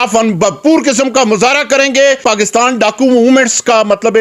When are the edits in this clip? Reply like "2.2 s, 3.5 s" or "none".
2.2 s